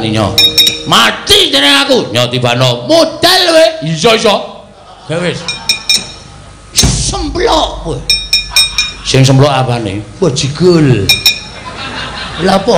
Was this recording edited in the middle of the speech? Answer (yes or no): no